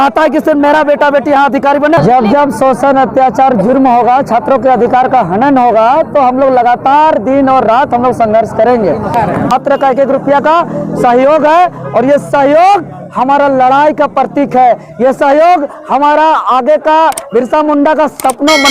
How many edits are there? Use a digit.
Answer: 2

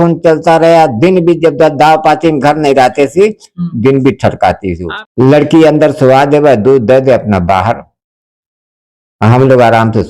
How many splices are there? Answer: 1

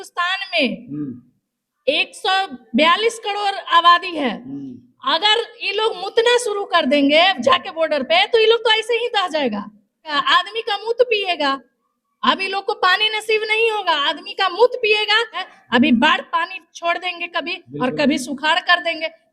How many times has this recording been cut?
2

